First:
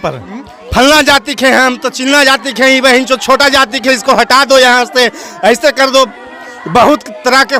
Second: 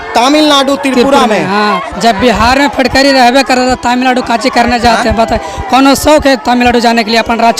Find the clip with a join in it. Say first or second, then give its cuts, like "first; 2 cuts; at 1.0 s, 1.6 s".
second; 1 cut; at 1.9 s